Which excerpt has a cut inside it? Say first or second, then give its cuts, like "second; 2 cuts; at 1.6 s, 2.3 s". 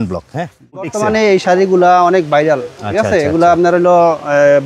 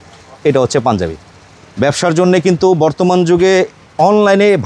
first; 1 cut; at 0.9 s